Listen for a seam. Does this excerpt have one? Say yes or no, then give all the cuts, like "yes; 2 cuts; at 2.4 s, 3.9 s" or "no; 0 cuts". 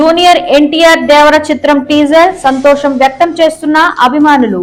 no; 0 cuts